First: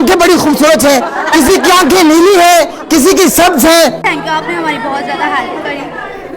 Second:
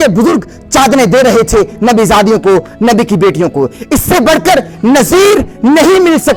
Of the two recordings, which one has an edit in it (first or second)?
first